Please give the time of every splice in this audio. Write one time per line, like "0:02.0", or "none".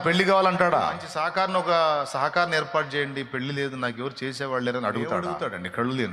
0:01.1
0:05.3